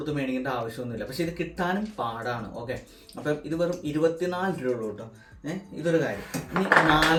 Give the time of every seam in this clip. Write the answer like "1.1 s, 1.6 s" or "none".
none